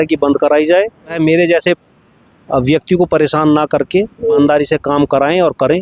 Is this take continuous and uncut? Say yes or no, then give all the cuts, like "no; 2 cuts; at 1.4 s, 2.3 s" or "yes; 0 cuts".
no; 2 cuts; at 1.2 s, 4.4 s